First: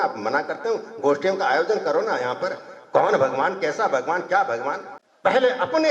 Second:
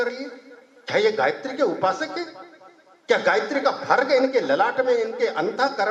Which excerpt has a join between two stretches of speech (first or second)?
first